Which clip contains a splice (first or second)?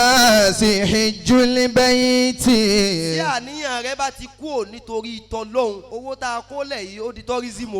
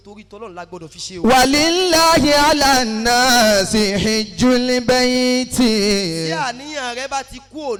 first